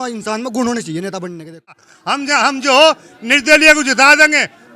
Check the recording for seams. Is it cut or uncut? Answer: cut